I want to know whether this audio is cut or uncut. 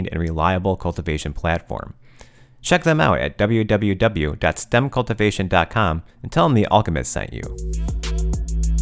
cut